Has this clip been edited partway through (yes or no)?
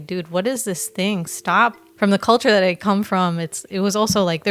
yes